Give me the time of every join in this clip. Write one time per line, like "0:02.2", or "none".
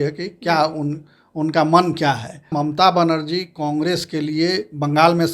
0:02.5